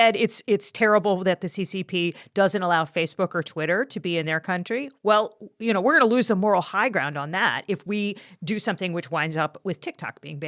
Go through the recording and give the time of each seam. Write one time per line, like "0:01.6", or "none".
0:09.6